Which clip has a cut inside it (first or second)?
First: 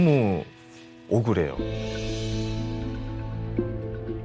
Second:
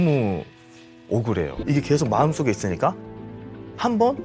second